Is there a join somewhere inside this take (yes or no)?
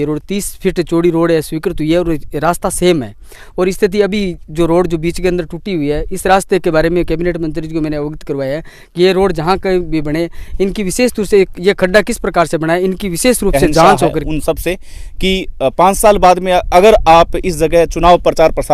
yes